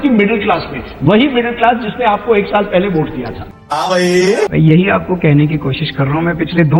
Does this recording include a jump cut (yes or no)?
no